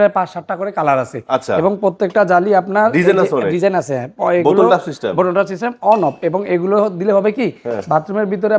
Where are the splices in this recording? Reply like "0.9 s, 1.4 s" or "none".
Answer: none